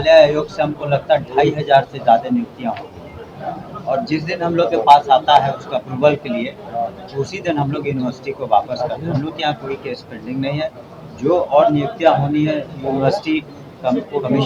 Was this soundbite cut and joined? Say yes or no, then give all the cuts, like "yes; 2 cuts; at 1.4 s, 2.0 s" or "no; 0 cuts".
no; 0 cuts